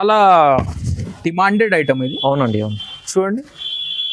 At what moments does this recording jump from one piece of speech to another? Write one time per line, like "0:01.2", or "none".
none